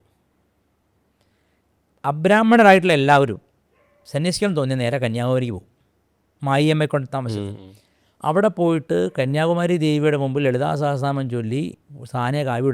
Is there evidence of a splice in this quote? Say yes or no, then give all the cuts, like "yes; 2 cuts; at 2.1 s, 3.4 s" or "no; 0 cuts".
no; 0 cuts